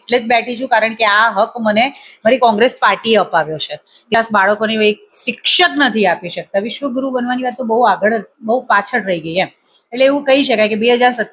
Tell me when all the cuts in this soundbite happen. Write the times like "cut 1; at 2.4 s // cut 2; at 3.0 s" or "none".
cut 1; at 4.1 s